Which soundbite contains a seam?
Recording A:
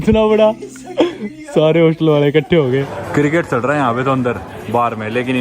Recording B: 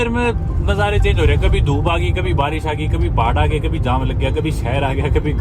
A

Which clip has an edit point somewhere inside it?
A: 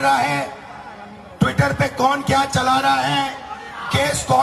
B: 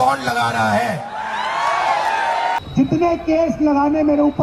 B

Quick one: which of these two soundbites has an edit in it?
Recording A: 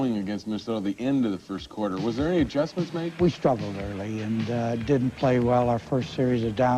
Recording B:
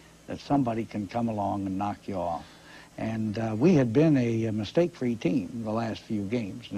A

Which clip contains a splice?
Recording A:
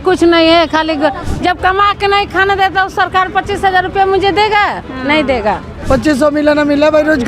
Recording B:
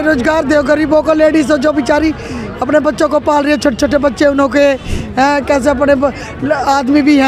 A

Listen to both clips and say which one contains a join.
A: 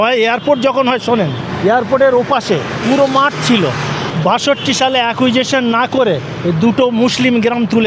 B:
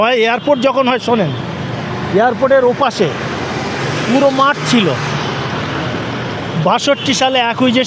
A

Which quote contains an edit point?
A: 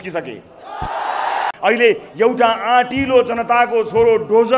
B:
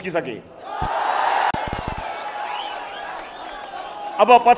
A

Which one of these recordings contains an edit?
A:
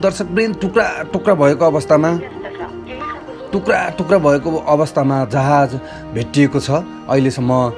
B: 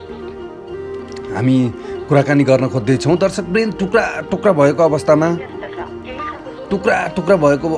B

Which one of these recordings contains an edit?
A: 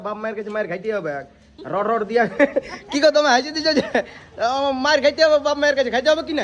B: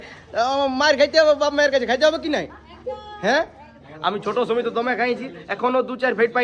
B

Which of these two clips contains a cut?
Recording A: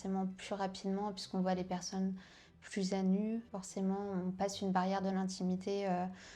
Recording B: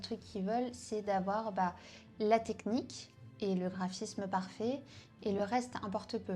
A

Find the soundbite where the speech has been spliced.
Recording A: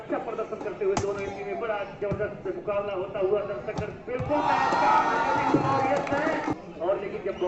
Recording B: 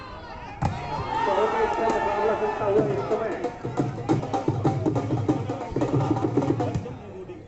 B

